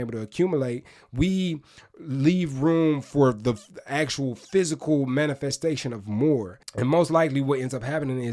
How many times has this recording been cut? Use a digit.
1